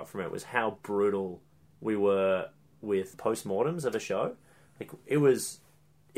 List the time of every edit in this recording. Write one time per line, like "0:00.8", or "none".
0:03.1